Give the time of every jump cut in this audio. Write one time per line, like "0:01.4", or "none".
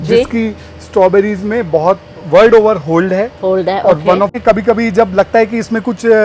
0:04.3

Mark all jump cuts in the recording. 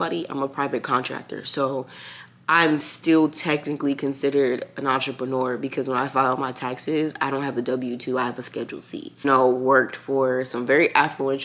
0:09.2

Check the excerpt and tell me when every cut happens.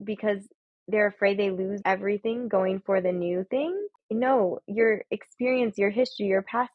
0:04.0

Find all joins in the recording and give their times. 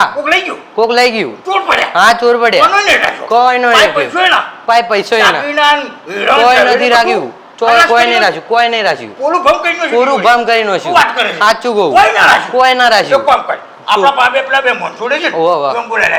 none

